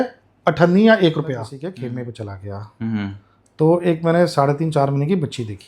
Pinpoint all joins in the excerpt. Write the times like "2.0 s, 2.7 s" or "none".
1.5 s